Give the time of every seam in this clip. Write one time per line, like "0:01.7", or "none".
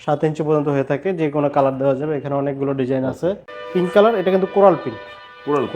0:03.5